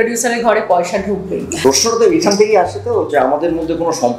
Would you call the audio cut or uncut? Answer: cut